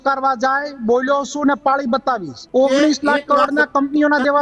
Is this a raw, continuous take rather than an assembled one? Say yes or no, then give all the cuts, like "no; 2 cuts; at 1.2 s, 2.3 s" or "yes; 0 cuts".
no; 1 cut; at 2.4 s